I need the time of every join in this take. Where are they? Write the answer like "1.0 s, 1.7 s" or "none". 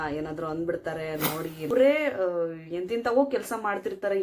1.7 s